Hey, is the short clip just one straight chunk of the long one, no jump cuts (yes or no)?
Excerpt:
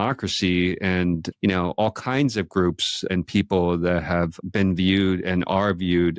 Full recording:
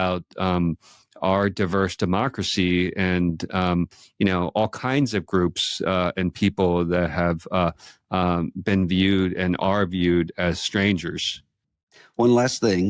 no